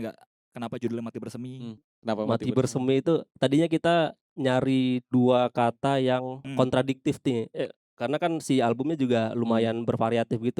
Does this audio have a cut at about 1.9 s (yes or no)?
yes